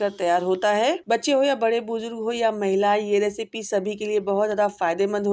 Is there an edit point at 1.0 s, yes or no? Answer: yes